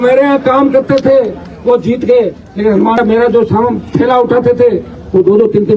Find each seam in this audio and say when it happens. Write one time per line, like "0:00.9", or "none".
0:03.0